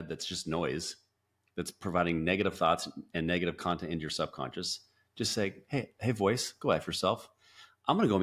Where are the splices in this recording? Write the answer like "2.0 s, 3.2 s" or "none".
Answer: none